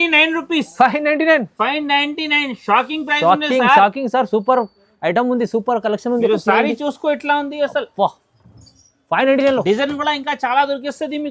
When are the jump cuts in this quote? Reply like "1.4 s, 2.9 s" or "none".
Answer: none